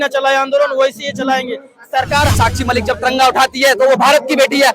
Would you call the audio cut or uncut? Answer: cut